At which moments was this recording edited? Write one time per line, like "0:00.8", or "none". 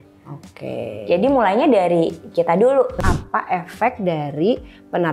0:03.0